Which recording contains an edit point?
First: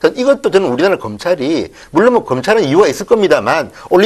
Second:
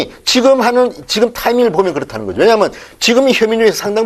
second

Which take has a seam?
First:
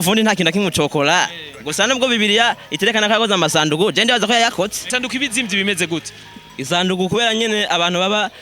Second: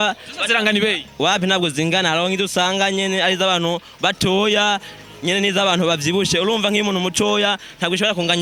first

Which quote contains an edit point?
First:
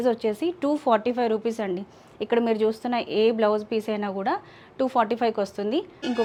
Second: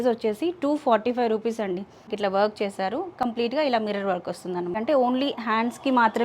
second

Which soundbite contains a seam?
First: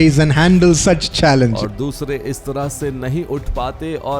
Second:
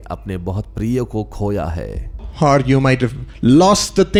first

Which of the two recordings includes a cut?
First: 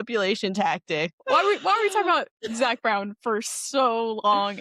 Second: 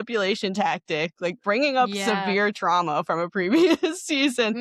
first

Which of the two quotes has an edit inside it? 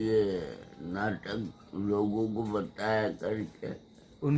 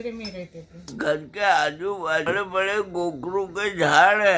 second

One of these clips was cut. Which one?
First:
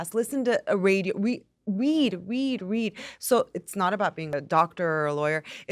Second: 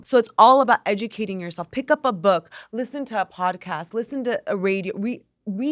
first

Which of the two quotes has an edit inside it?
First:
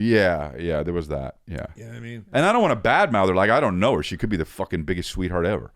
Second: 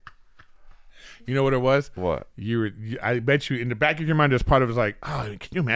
first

